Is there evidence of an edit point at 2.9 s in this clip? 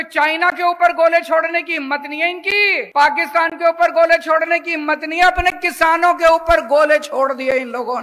yes; 1 cut; at 2.9 s

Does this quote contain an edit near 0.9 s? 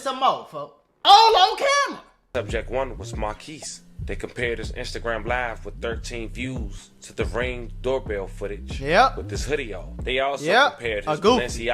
yes; 2 cuts; at 0.9 s, 2.0 s

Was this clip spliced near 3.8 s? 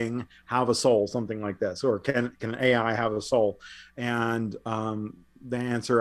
no; 0 cuts

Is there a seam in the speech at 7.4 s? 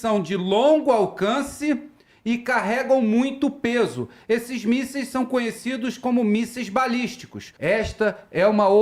yes; 1 cut; at 7.4 s

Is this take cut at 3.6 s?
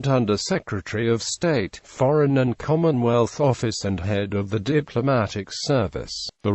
no; 0 cuts

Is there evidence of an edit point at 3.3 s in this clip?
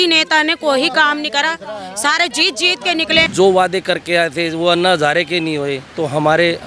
yes; 1 cut; at 3.3 s

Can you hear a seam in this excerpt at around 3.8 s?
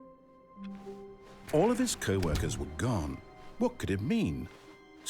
no; 1 cut; at 1.5 s

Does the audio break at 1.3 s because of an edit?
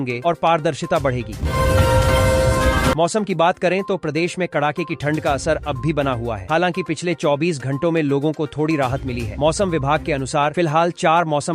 yes; 2 cuts; at 1.3 s, 3.0 s

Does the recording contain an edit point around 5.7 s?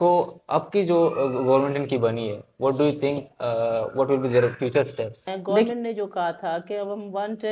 yes; 1 cut; at 5.7 s

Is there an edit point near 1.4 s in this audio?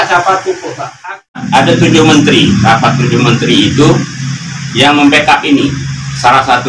yes; 1 cut; at 1.4 s

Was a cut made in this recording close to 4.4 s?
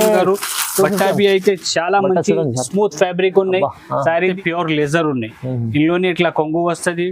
yes; 1 cut; at 4.4 s

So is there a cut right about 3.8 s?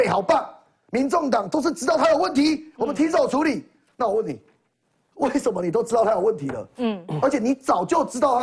no; 0 cuts

